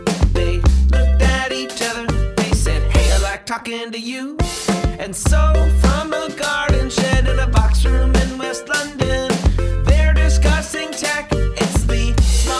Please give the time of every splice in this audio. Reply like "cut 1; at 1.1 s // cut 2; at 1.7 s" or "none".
none